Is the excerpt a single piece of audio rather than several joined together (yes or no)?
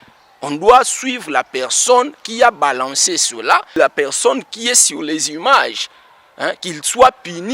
no